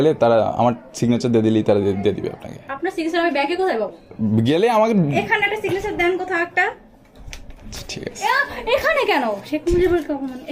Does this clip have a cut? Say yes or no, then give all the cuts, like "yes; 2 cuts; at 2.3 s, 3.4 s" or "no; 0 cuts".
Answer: no; 0 cuts